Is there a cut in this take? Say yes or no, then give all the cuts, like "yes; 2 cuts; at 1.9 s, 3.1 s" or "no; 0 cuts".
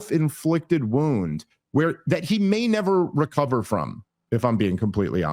no; 0 cuts